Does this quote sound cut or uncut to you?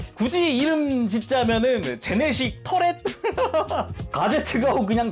cut